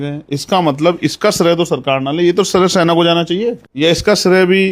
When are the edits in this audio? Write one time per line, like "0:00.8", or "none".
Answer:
0:03.7